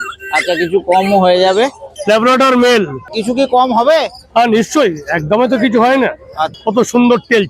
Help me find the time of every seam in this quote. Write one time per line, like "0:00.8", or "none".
0:01.8
0:03.1
0:06.5